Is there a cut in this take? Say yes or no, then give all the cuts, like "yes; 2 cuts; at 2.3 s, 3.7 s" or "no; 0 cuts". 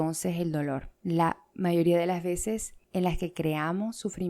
yes; 1 cut; at 2.8 s